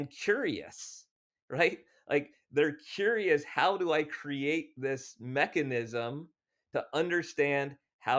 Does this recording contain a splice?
no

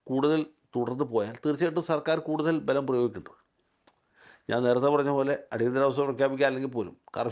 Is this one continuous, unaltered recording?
yes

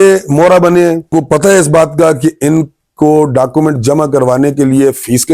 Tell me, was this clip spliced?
yes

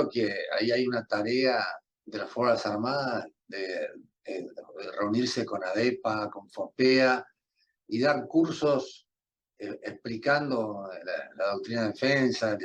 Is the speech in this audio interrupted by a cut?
no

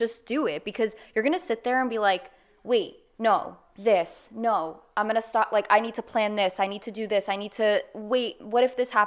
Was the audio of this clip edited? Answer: no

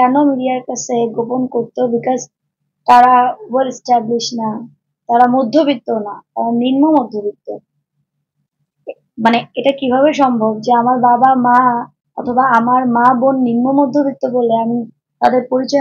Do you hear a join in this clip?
no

